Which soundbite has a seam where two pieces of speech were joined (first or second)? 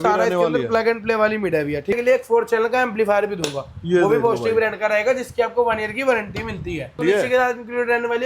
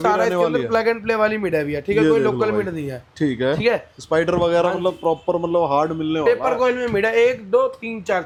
first